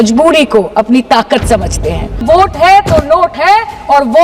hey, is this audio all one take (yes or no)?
no